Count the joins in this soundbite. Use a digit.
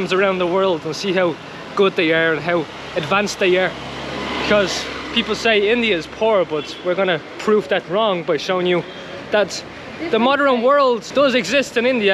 1